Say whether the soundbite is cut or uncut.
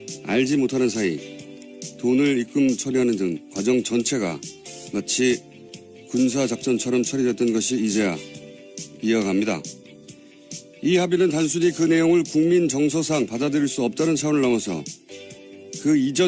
uncut